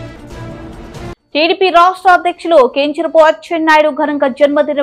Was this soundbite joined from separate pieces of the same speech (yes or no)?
no